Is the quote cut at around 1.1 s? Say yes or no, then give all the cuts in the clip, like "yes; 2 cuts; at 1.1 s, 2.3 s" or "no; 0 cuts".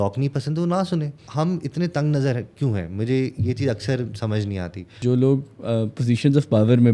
yes; 2 cuts; at 1.1 s, 5.0 s